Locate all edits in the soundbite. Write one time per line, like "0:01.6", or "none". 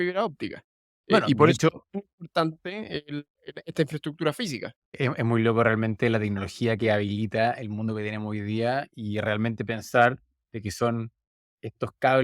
0:05.0